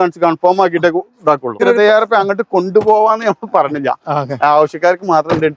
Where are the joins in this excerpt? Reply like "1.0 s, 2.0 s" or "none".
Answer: 1.6 s